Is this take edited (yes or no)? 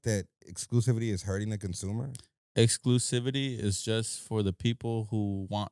no